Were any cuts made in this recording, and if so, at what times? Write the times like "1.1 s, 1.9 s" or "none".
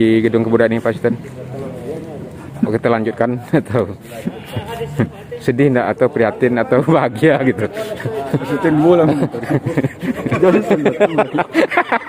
none